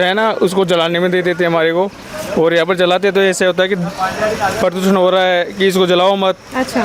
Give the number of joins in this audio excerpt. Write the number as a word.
zero